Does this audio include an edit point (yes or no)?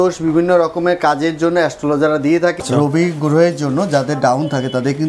yes